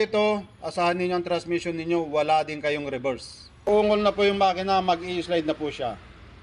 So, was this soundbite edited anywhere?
yes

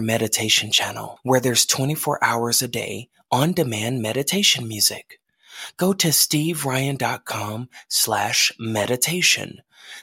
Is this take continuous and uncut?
yes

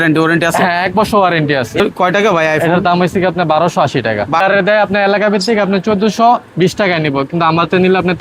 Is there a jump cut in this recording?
yes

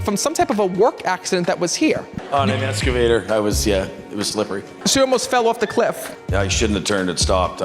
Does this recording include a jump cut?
yes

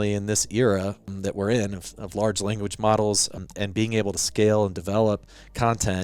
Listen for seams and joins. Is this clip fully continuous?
no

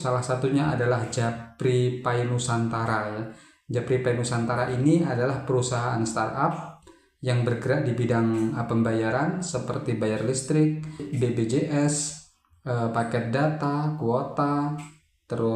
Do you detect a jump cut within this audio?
yes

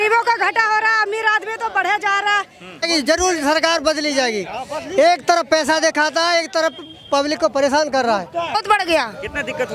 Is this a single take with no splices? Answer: no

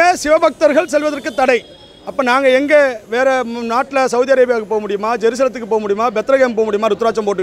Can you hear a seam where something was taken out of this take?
no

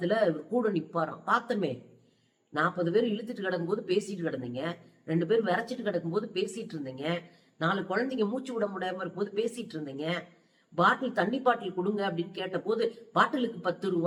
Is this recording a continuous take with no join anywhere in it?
yes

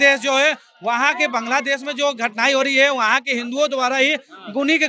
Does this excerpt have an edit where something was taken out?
no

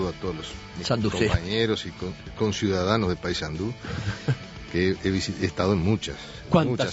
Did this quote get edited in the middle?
no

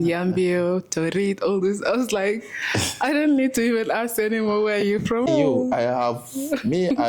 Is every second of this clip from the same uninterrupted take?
no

